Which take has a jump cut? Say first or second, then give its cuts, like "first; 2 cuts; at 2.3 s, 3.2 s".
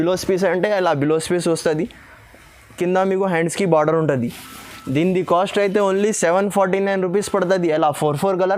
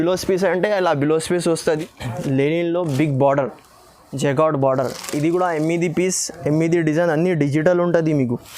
second; 1 cut; at 1.6 s